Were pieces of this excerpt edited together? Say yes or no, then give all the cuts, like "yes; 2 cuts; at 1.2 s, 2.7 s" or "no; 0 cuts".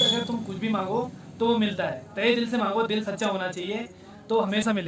no; 0 cuts